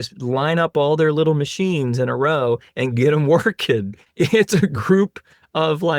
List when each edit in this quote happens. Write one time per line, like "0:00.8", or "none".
0:04.0